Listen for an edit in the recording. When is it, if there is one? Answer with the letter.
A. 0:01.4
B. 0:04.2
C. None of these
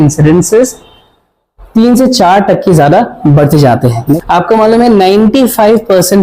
B